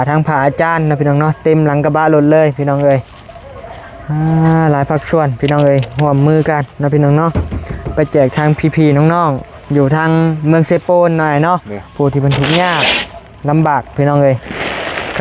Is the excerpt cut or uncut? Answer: uncut